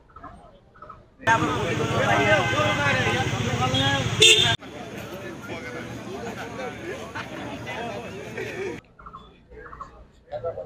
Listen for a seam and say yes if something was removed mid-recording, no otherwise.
no